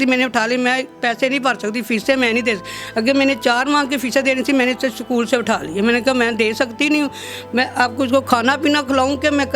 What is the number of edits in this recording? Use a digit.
0